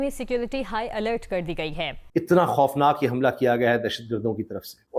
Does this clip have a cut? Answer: no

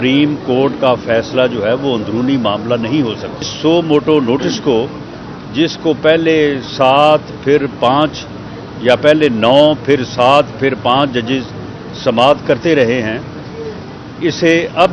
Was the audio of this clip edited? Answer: yes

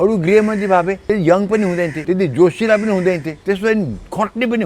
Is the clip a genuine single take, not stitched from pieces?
no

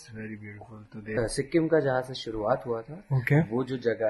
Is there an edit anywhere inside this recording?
yes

